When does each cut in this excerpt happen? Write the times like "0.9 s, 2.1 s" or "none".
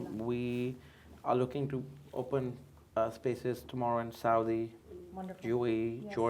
none

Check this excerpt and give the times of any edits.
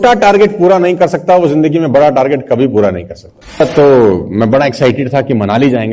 3.6 s

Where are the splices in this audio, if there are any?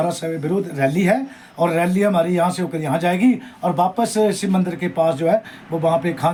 none

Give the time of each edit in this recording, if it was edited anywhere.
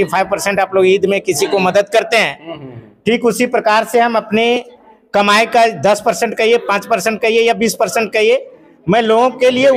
none

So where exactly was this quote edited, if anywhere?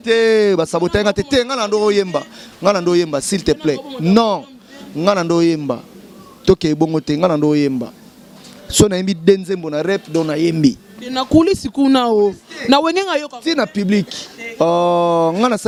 none

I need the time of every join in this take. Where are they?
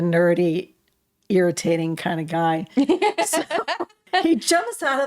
4.0 s

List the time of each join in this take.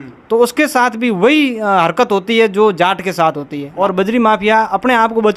3.6 s

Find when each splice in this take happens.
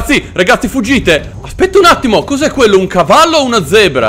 1.3 s

